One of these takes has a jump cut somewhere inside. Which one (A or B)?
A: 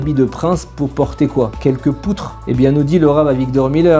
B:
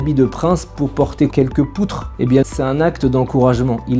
B